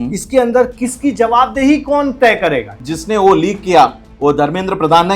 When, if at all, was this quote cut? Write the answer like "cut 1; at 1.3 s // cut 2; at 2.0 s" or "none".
cut 1; at 2.7 s